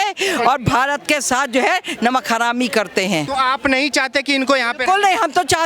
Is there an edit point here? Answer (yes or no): no